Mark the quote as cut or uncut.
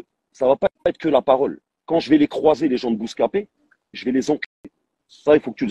uncut